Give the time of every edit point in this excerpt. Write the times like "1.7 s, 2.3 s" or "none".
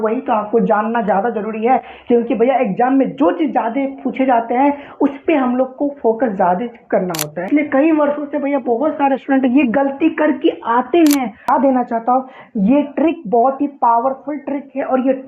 7.5 s, 11.4 s